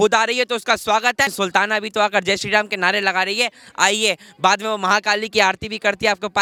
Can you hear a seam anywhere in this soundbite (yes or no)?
no